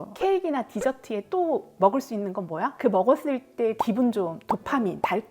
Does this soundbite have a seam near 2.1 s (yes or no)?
no